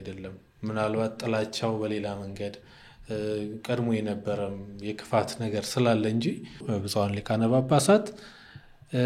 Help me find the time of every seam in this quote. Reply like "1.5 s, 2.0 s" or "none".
6.7 s

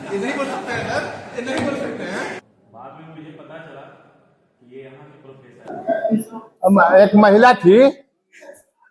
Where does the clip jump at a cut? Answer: 2.5 s, 5.6 s

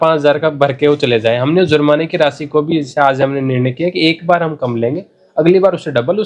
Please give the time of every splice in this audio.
none

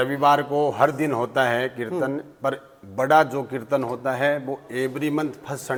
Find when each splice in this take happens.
none

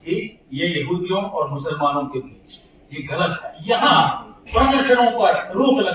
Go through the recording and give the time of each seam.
3.5 s

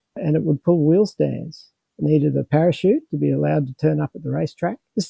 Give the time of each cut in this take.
2.0 s

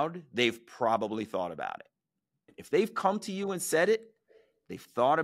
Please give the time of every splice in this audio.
2.5 s

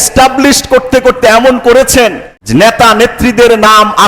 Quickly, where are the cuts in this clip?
2.3 s

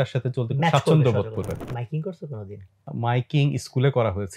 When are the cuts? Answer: 1.7 s, 2.9 s

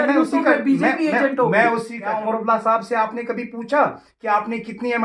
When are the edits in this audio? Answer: 1.9 s

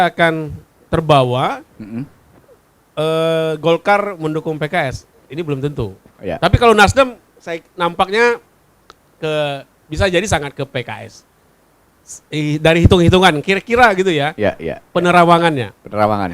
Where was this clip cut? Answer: none

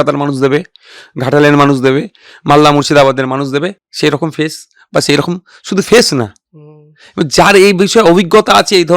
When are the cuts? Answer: 3.8 s

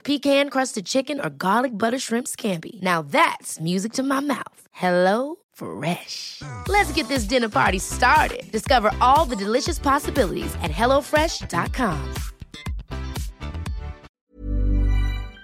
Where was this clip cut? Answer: 14.1 s

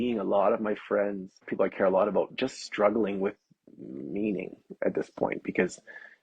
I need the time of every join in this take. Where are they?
1.4 s

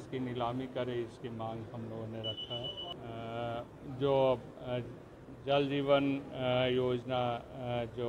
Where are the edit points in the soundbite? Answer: 2.9 s

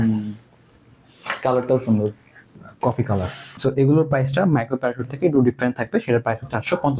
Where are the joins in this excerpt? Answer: 2.6 s, 3.6 s

